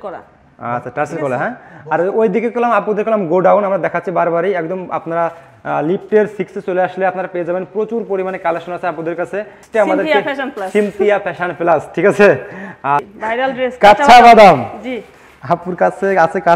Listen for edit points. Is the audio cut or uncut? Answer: cut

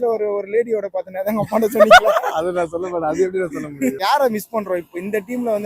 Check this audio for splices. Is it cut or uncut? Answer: cut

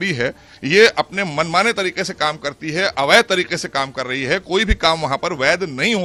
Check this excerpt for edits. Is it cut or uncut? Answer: uncut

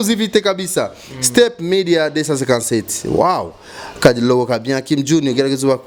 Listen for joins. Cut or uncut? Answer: uncut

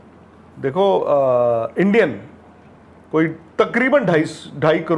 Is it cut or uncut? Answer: uncut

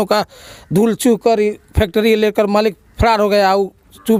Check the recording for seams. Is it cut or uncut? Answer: uncut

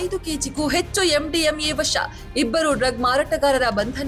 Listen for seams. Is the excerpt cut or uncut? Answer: uncut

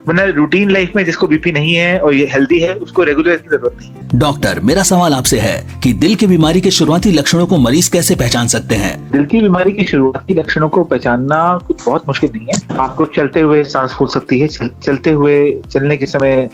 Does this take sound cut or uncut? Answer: uncut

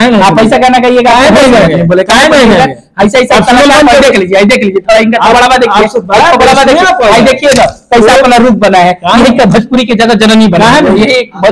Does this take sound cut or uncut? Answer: uncut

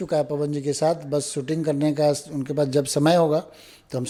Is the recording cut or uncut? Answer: uncut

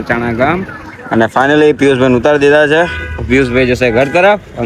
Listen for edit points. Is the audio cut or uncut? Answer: uncut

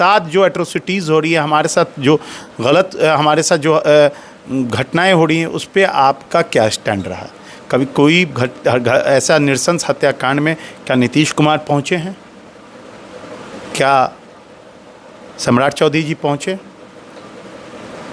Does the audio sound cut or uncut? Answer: uncut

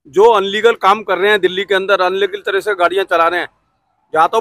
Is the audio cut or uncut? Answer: uncut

